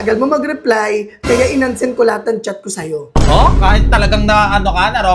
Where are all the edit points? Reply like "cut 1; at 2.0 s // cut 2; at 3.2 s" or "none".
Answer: none